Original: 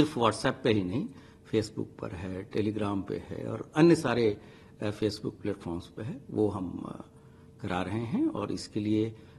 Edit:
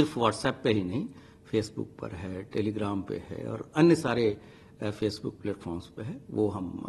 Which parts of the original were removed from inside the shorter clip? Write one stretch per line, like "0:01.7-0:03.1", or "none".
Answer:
none